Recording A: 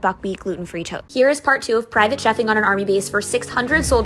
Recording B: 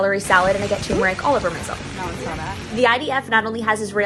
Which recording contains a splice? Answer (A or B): A